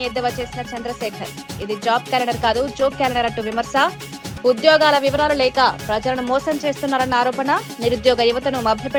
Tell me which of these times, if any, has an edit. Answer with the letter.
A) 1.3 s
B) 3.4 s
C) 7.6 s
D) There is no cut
D